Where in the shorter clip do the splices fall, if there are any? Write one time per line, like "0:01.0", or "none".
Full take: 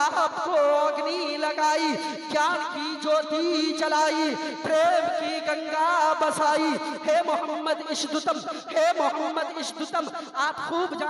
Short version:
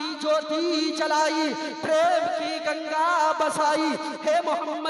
none